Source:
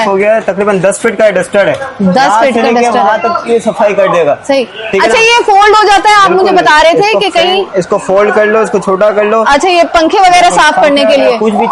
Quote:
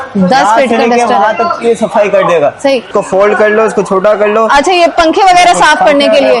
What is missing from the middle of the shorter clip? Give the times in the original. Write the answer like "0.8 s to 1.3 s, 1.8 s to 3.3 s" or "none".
4.7 s to 7.8 s